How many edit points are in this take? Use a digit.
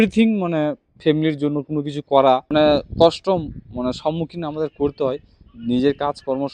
1